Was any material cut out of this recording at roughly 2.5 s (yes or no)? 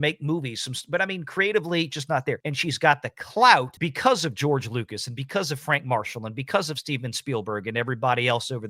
yes